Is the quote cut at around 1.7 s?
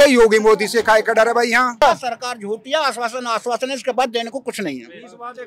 yes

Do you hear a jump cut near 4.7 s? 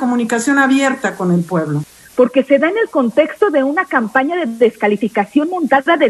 no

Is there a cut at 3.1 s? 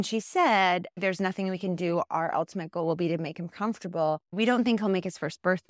no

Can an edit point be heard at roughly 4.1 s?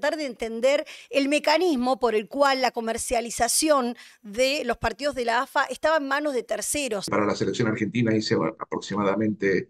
no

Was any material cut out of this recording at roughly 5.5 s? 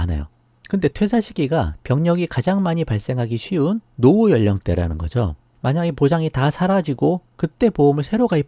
yes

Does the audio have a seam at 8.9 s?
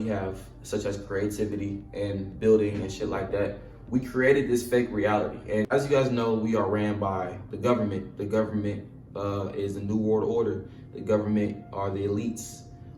no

